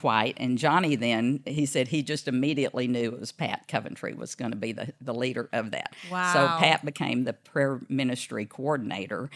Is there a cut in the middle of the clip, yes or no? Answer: no